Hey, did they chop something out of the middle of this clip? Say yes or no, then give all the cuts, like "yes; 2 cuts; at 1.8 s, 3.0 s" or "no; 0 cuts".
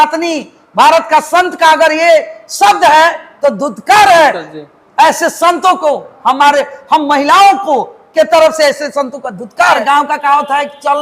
yes; 1 cut; at 9.8 s